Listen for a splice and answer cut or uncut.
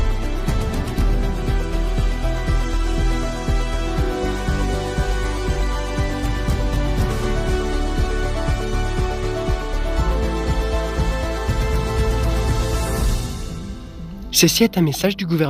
cut